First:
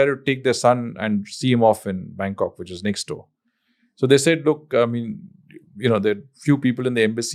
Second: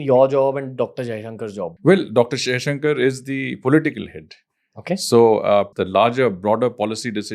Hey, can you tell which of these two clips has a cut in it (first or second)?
second